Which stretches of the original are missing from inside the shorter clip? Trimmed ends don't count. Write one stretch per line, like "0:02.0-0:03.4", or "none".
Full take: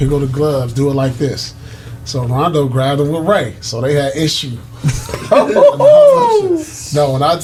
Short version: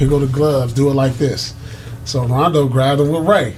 none